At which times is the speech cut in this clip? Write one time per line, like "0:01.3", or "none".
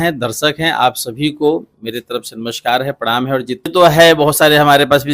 0:03.7